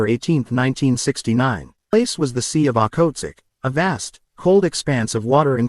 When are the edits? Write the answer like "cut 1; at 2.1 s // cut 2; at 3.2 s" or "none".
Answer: cut 1; at 1.9 s